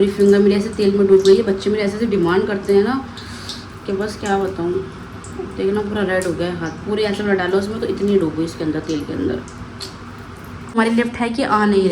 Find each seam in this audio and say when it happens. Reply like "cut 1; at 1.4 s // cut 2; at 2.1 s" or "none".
cut 1; at 10.7 s